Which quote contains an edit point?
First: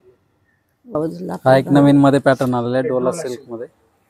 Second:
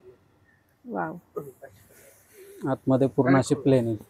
first; 1 cut; at 0.9 s

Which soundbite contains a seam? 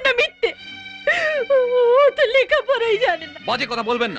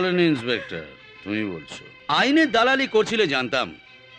second; 1 cut; at 1.9 s

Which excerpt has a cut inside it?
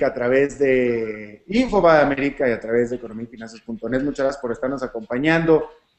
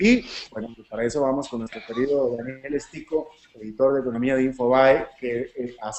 second; 1 cut; at 3.8 s

